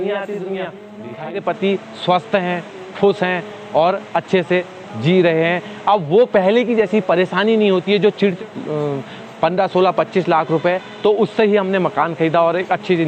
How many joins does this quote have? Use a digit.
2